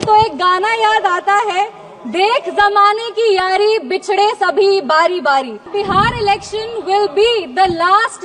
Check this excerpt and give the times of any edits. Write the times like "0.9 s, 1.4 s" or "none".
5.7 s